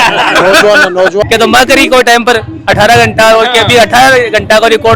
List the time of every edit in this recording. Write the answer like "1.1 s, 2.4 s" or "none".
1.2 s